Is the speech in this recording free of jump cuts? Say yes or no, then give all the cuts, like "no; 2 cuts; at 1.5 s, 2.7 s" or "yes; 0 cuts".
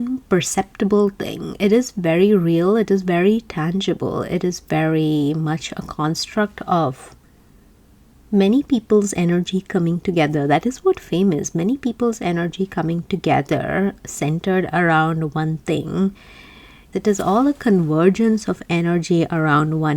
no; 1 cut; at 16.8 s